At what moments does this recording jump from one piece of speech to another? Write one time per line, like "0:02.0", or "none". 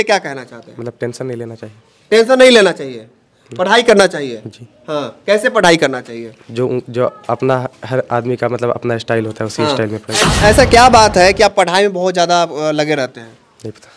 0:10.2